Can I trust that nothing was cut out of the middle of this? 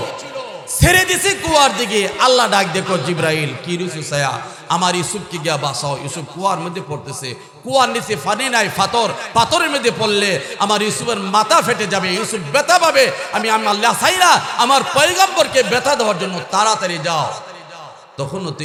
yes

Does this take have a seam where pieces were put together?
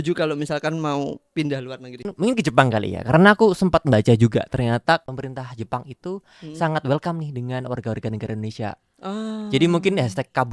yes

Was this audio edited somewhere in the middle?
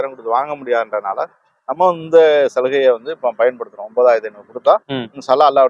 no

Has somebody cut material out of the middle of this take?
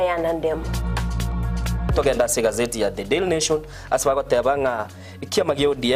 no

